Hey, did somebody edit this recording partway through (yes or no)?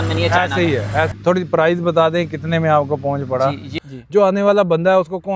yes